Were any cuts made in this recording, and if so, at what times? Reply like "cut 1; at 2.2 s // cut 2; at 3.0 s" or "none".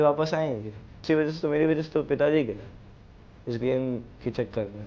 cut 1; at 1.0 s